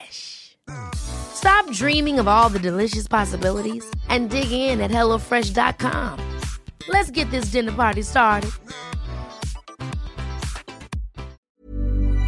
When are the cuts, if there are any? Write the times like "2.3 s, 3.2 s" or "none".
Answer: 11.3 s